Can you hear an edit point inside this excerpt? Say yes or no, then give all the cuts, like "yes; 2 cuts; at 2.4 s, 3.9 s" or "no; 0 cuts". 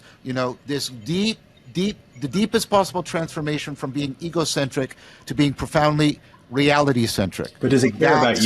no; 0 cuts